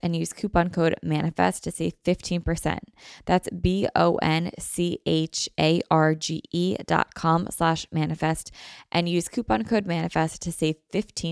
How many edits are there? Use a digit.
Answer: 0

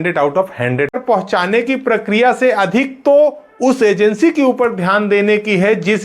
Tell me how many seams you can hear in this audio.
1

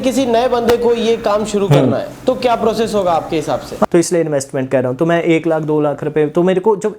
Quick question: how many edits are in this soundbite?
2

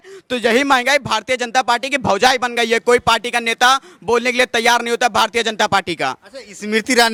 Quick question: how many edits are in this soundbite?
0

